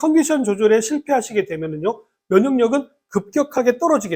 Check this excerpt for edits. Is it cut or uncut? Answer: uncut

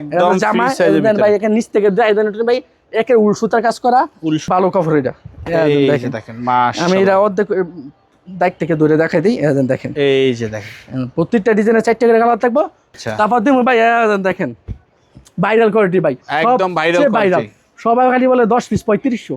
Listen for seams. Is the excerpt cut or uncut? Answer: cut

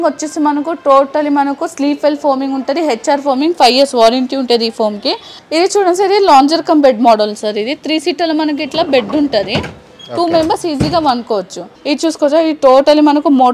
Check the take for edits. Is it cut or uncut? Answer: cut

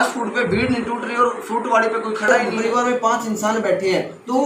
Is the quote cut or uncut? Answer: cut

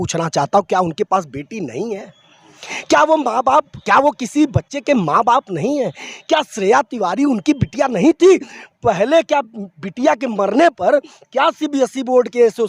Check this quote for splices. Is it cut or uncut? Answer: uncut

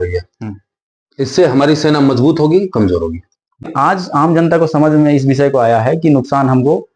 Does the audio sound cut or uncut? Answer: cut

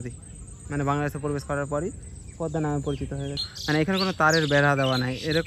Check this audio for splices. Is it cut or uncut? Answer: cut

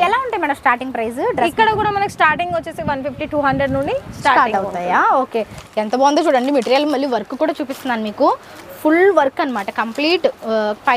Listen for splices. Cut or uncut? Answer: cut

